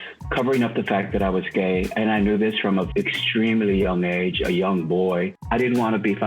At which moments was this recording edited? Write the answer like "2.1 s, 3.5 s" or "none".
2.9 s, 5.3 s